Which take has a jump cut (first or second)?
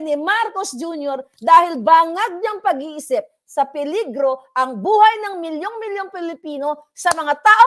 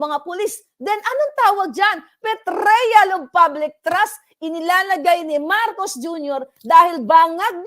second